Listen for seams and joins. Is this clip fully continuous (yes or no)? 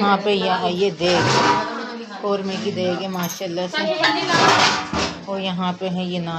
yes